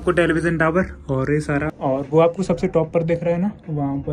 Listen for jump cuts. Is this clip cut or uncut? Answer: cut